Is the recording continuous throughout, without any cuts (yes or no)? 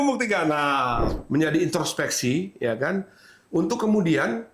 no